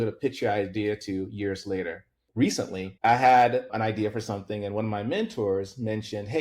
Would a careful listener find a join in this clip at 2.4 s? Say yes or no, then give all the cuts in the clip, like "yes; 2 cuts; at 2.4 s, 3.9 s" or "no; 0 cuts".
yes; 2 cuts; at 2.4 s, 3.7 s